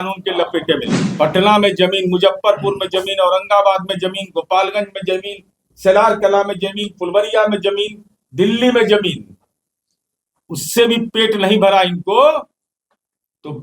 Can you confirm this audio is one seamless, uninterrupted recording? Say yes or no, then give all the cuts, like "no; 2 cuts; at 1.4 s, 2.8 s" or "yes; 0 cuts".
no; 1 cut; at 1.0 s